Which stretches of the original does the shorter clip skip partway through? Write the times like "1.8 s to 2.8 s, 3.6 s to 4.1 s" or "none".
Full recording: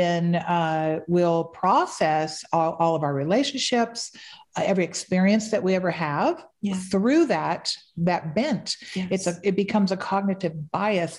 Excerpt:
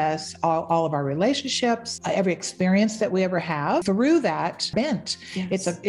4.0 s to 4.4 s, 6.4 s to 6.9 s, 7.7 s to 8.3 s

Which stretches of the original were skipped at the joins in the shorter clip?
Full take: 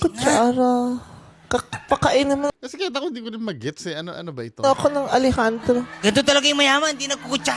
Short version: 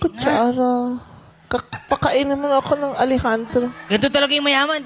2.5 s to 4.6 s

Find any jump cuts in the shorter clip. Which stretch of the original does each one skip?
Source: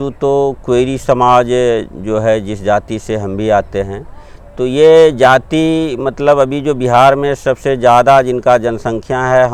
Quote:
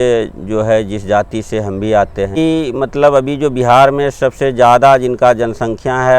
3.9 s to 5.6 s

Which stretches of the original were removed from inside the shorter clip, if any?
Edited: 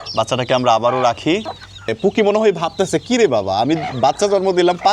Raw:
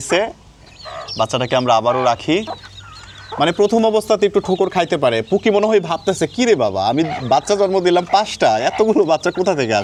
2.9 s to 5.2 s

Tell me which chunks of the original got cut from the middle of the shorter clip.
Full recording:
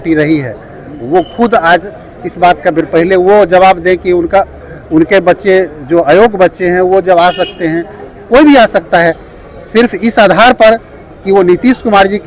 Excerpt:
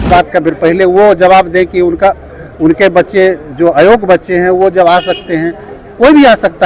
none

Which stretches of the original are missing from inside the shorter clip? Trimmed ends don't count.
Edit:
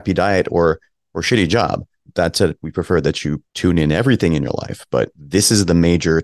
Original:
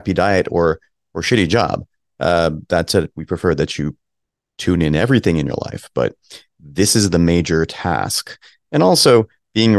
2.1 s to 2.6 s, 4.0 s to 4.5 s, 6.2 s to 6.6 s

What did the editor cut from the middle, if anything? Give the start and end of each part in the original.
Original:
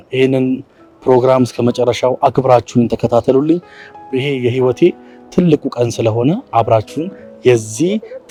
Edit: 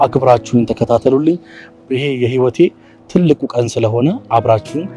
none

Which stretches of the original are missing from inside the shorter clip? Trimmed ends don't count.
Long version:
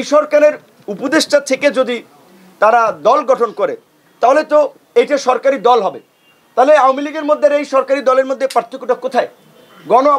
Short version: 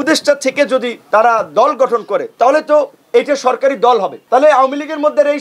2.0 s to 2.4 s, 3.8 s to 4.1 s, 6.0 s to 6.4 s

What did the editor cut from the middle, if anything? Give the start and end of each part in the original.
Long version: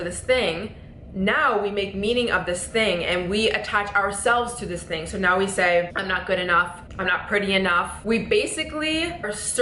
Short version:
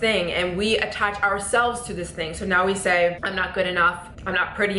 none

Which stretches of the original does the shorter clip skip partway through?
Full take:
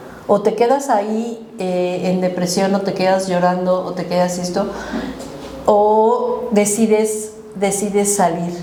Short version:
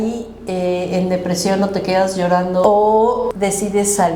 3.7 s to 5.7 s, 6.4 s to 7.5 s

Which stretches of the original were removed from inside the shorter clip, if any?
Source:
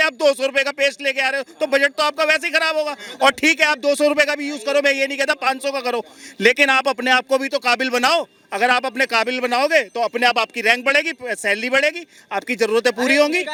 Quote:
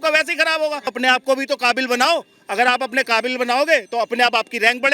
3.1 s to 7.0 s

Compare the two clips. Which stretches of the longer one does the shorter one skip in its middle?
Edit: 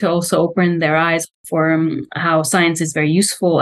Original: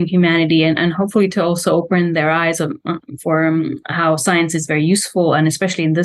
2.6 s to 3.0 s

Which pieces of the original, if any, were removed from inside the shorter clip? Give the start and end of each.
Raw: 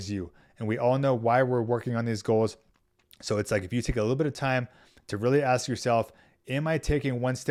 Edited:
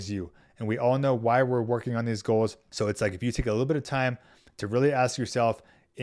2.6 s to 3.1 s

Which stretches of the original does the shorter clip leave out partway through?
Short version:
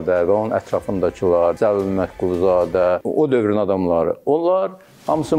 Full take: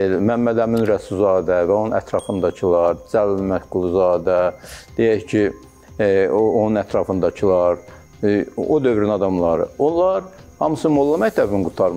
3.0 s to 3.1 s, 4.6 s to 8.6 s

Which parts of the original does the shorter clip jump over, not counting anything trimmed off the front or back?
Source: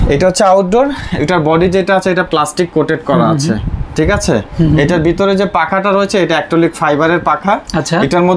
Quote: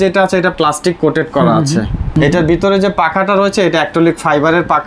3.9 s to 4.7 s

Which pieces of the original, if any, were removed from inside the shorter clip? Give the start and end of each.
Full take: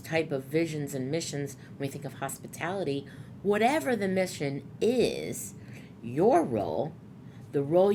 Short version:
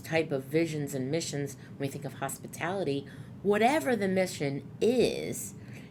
none

